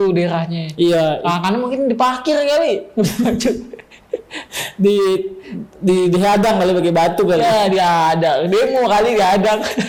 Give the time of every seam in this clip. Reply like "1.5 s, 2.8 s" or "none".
none